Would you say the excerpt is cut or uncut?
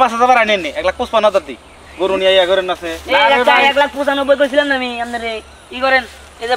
uncut